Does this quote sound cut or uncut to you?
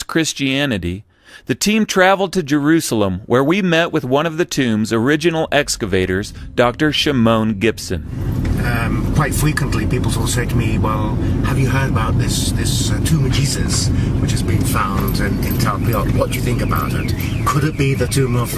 cut